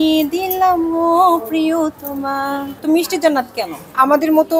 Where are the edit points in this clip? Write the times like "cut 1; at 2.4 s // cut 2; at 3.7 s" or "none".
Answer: cut 1; at 2.7 s